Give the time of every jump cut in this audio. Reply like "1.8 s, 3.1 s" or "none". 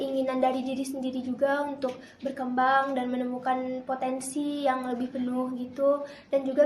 none